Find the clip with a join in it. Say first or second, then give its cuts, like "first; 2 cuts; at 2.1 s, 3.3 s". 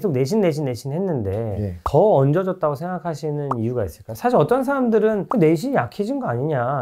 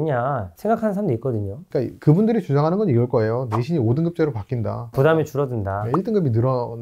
second; 1 cut; at 1.6 s